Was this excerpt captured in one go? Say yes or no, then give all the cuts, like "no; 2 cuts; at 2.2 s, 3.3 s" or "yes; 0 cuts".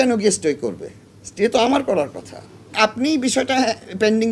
no; 1 cut; at 2.7 s